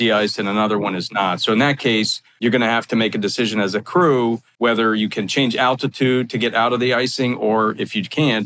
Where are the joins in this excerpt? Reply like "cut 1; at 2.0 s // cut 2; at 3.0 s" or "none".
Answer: cut 1; at 2.2 s // cut 2; at 4.5 s